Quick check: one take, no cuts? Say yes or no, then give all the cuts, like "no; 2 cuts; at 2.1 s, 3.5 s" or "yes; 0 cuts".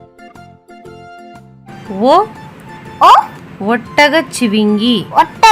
yes; 0 cuts